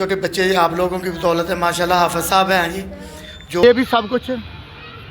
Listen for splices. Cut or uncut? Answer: cut